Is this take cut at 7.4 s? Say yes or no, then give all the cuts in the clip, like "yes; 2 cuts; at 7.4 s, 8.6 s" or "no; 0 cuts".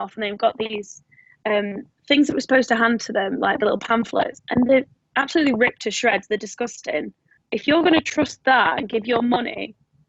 yes; 1 cut; at 7.4 s